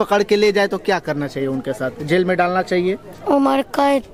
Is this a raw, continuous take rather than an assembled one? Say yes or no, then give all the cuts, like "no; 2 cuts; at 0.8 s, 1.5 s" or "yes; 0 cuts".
yes; 0 cuts